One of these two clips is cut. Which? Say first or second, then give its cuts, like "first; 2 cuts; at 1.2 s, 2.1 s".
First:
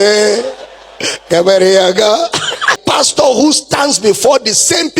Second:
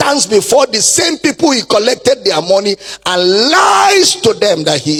first; 1 cut; at 2.8 s